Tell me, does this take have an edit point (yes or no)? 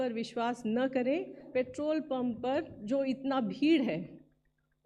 yes